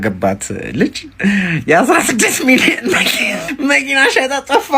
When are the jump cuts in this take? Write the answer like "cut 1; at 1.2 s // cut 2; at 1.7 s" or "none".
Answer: cut 1; at 3.7 s